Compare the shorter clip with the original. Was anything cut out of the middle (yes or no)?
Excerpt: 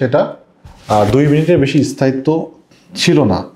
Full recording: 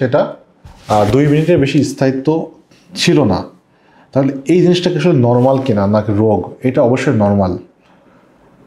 no